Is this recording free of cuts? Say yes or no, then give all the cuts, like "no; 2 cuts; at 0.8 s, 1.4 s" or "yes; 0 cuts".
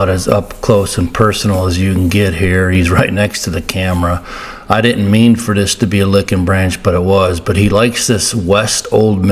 yes; 0 cuts